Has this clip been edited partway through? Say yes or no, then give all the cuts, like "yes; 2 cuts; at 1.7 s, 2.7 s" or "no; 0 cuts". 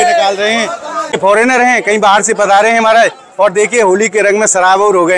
yes; 1 cut; at 1.2 s